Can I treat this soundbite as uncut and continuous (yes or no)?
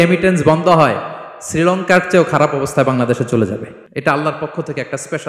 no